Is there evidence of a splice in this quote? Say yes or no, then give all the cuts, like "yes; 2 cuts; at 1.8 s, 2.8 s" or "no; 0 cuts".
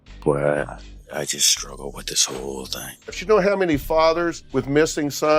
yes; 2 cuts; at 3.2 s, 4.4 s